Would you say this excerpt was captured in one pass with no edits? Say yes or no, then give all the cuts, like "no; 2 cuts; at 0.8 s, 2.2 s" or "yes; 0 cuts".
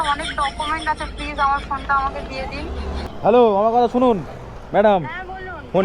no; 1 cut; at 3.0 s